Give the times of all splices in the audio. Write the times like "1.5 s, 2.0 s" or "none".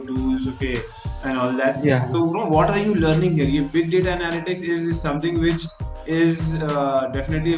none

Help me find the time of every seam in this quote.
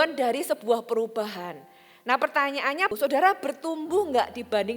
2.9 s

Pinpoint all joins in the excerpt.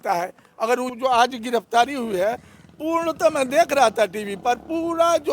0.9 s

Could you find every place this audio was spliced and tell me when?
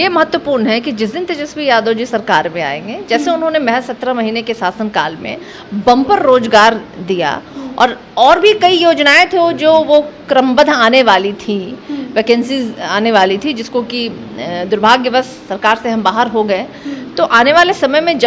none

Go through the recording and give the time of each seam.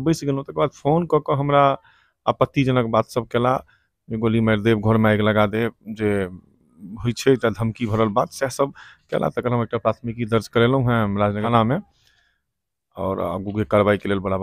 11.5 s

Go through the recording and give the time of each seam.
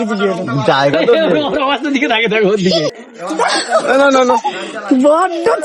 2.9 s

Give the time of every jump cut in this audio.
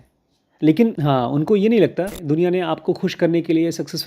1.0 s, 2.2 s

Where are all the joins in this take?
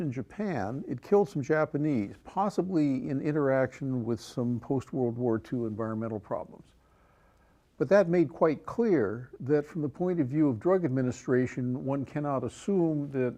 none

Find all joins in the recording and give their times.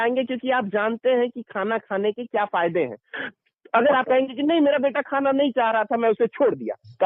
none

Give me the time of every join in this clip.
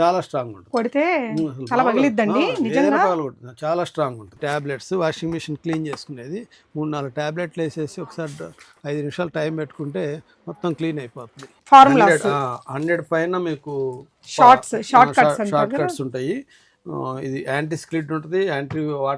4.3 s, 11.5 s

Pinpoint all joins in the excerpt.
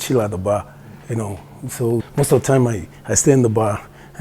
2.1 s

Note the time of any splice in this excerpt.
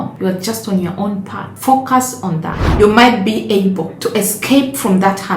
2.6 s

